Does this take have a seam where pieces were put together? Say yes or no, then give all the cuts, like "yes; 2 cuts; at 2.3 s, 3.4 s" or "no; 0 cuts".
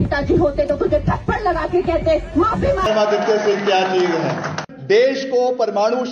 yes; 1 cut; at 2.9 s